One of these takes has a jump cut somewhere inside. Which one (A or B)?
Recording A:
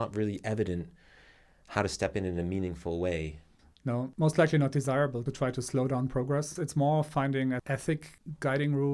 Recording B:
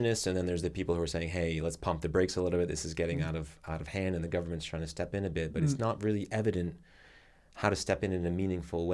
A